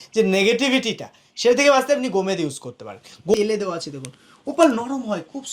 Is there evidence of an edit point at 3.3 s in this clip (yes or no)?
yes